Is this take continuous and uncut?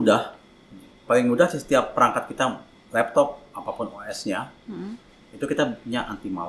yes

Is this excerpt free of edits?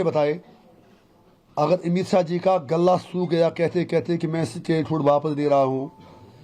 yes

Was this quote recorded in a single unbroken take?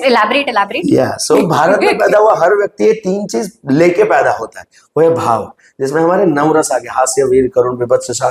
yes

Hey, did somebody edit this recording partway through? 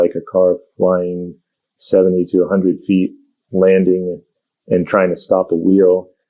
no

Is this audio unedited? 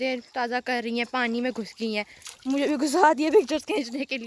yes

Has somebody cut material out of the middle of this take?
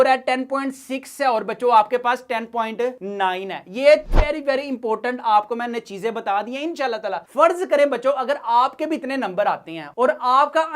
yes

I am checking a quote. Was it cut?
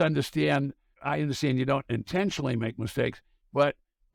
yes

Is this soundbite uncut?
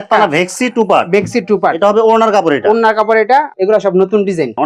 yes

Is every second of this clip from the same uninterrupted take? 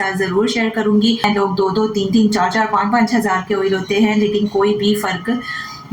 no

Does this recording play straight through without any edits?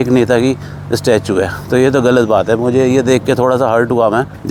yes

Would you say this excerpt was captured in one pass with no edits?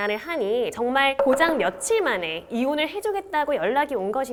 yes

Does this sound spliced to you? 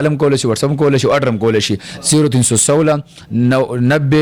no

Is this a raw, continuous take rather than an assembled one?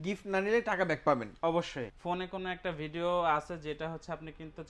no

